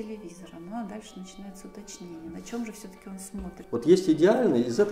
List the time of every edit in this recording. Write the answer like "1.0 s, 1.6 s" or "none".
3.6 s